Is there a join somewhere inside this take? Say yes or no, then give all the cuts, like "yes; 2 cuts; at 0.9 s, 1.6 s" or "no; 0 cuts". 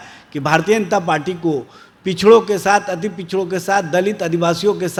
no; 0 cuts